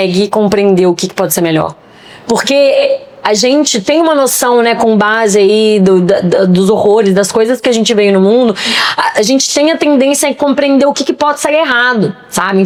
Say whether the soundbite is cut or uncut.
uncut